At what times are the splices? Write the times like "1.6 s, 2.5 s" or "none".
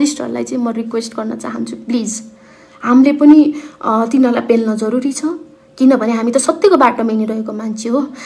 none